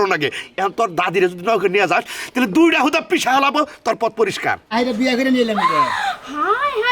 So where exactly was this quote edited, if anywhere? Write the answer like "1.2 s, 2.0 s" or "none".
4.6 s